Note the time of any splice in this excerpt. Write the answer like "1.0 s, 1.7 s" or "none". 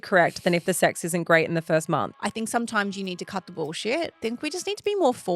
2.1 s, 4.1 s

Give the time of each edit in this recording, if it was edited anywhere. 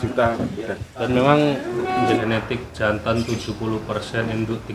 2.0 s

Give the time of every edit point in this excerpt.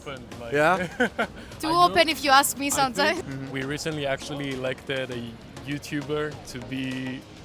3.2 s

